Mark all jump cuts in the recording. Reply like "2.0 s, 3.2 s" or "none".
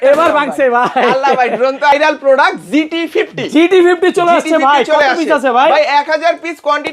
1.9 s